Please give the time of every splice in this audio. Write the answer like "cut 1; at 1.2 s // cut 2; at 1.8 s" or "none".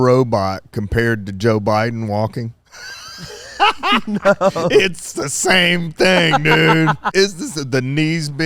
cut 1; at 7.1 s